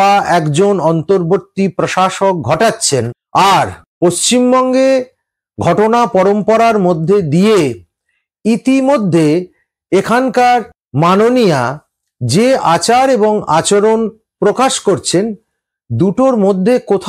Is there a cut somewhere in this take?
no; 0 cuts

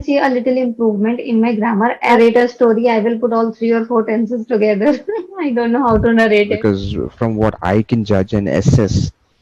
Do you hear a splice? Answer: yes; 2 cuts; at 2.2 s, 6.6 s

